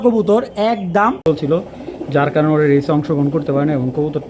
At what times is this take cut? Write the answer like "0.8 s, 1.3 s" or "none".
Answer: 1.2 s